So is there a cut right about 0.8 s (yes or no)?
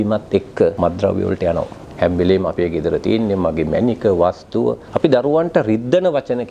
yes